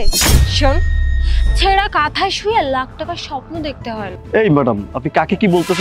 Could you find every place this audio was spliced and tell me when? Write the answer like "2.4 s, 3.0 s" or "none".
4.2 s